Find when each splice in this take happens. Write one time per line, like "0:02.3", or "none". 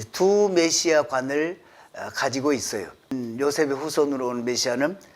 0:03.1